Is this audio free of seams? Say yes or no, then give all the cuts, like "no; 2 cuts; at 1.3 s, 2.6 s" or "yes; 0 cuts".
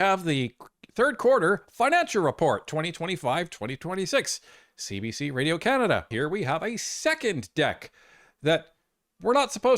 no; 1 cut; at 6.1 s